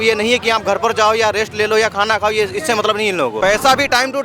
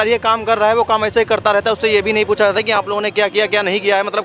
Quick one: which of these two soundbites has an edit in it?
first; 1 cut; at 3.4 s

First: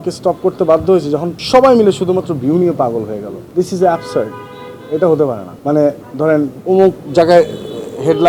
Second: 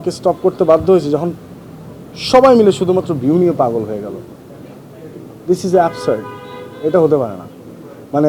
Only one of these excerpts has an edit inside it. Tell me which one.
first; 4 cuts; at 1.3 s, 3.4 s, 5.5 s, 6.6 s

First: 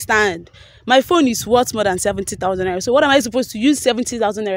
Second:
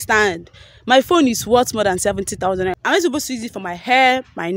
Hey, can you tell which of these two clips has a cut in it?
second; 1 cut; at 2.8 s

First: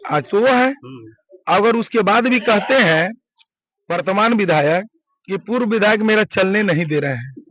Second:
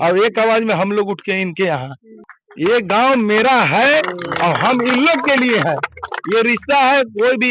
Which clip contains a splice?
second; 1 cut; at 2.2 s

